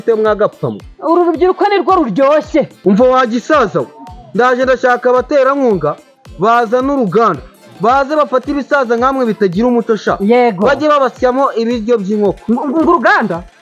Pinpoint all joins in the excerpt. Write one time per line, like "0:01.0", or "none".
0:02.7
0:12.4